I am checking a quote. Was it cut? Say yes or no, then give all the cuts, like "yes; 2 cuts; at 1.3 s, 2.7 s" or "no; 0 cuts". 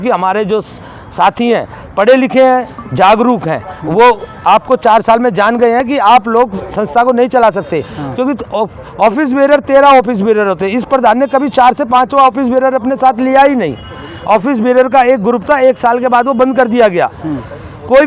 no; 0 cuts